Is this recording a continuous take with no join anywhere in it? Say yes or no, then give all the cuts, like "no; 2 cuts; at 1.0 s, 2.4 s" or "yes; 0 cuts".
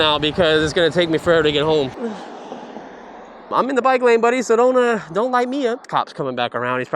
no; 3 cuts; at 1.9 s, 3.5 s, 5.9 s